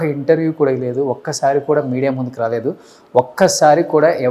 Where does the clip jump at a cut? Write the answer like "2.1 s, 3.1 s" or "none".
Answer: none

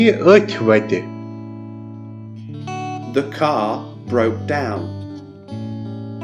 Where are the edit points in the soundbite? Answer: 5.1 s

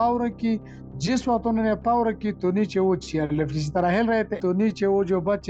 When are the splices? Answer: 4.4 s

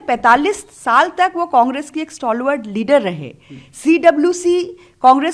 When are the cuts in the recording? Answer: none

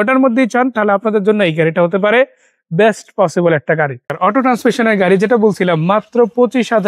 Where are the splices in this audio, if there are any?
4.1 s

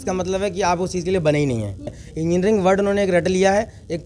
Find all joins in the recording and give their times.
1.9 s

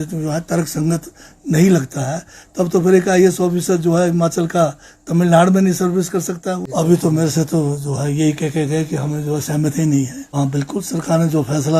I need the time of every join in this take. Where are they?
6.6 s, 10.4 s

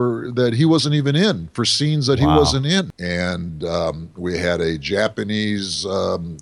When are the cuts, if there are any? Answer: 3.0 s

